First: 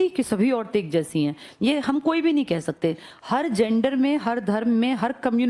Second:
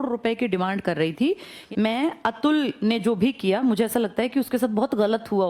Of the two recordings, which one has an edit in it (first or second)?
second